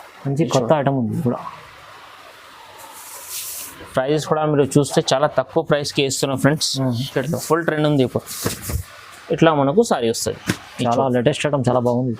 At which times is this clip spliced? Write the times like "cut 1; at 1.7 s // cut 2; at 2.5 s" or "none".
cut 1; at 7.1 s